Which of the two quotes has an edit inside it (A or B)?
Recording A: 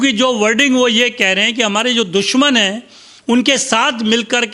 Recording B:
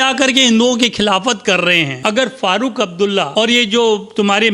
B